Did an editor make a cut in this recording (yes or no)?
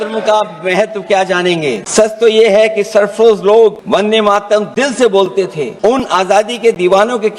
yes